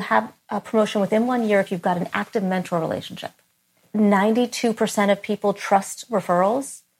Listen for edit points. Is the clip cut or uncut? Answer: cut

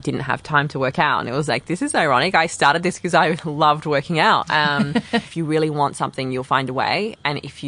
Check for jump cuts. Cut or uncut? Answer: cut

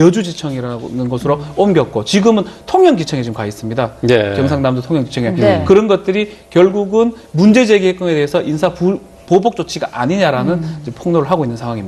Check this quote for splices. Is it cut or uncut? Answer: uncut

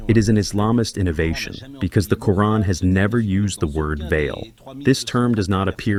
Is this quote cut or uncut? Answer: uncut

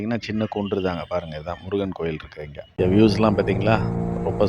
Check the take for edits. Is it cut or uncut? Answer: cut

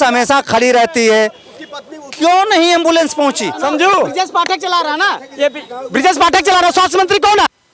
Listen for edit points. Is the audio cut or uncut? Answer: cut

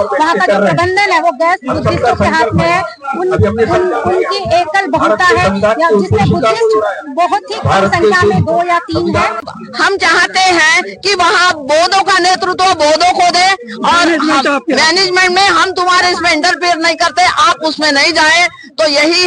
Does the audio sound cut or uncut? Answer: cut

